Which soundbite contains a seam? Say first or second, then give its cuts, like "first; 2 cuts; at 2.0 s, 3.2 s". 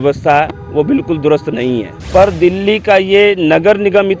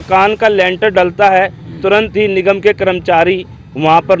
first; 1 cut; at 1.9 s